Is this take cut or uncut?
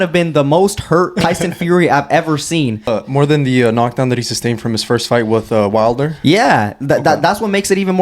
cut